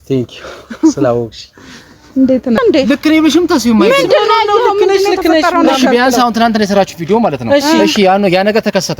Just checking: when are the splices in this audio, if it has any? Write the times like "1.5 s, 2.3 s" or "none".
2.6 s